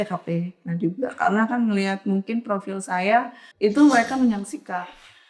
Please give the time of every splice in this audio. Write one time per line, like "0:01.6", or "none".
0:03.4